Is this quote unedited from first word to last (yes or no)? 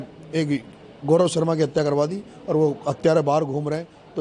yes